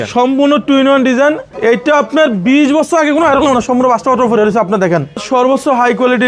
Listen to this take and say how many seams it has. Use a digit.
2